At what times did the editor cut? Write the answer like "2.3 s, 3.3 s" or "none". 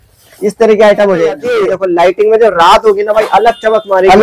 1.4 s